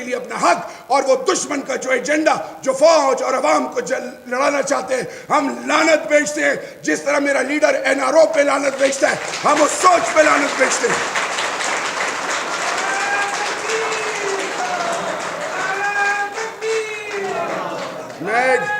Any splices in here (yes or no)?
no